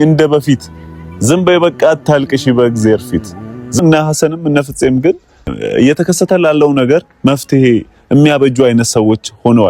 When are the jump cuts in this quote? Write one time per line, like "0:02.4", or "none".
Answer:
0:03.8
0:05.5